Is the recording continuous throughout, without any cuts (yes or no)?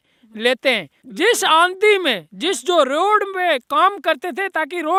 yes